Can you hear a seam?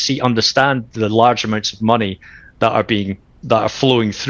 no; 0 cuts

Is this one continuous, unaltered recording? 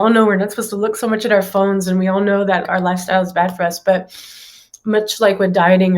no; 1 cut; at 2.6 s

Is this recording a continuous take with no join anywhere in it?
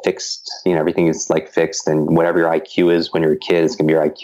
yes; 0 cuts

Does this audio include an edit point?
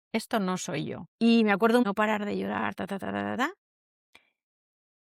yes; 2 cuts; at 1.0 s, 1.8 s

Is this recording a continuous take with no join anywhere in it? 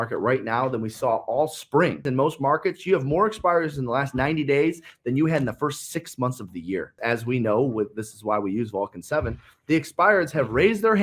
no; 2 cuts; at 2.1 s, 7.0 s

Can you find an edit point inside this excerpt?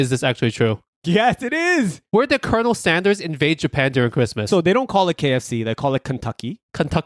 yes; 1 cut; at 2.0 s

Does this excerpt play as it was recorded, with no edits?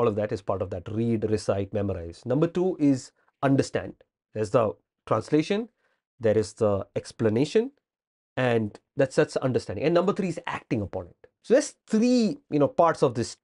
no; 2 cuts; at 4.3 s, 11.3 s

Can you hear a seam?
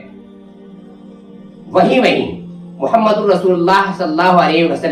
no; 0 cuts

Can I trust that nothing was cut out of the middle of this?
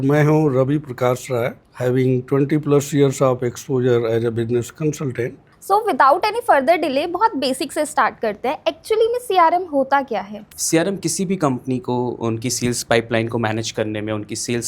no; 3 cuts; at 1.6 s, 5.5 s, 10.5 s

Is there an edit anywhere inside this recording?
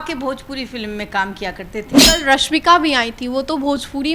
yes; 1 cut; at 1.9 s

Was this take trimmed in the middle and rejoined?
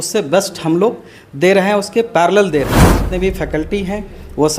yes; 1 cut; at 3.0 s

